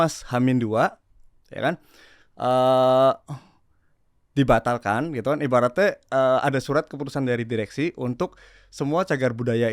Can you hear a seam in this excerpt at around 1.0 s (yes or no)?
no